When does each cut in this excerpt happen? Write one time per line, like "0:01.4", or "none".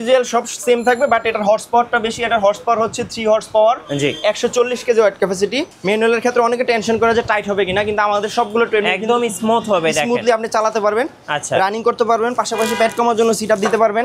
0:05.7